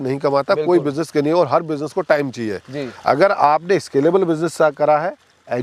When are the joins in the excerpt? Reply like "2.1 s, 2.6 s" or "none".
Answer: none